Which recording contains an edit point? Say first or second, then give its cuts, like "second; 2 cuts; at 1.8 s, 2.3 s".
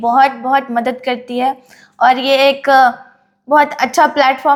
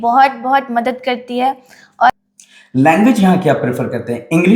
second; 1 cut; at 2.1 s